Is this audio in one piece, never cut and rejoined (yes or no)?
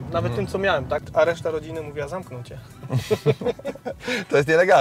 no